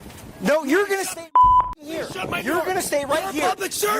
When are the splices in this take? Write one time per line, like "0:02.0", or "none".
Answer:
0:01.1
0:02.0